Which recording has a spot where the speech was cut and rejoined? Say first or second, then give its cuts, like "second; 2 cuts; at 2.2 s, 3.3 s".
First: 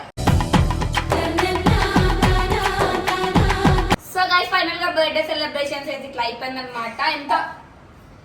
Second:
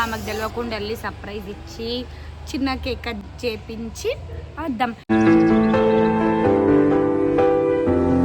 first; 1 cut; at 4.0 s